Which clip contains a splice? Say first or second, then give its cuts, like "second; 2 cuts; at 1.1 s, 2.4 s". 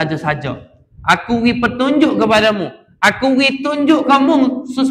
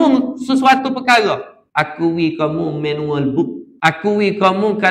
second; 2 cuts; at 1.6 s, 3.6 s